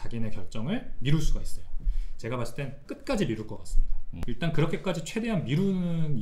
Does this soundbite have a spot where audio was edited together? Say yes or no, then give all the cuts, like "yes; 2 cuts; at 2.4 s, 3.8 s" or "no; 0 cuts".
no; 0 cuts